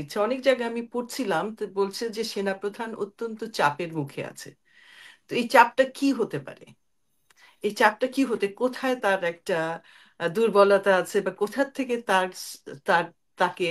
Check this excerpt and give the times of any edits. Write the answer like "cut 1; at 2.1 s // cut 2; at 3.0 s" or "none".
none